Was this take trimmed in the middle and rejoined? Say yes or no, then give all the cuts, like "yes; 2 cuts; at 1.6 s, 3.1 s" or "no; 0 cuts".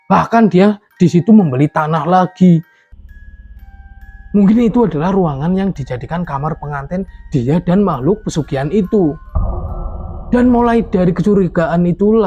yes; 1 cut; at 2.8 s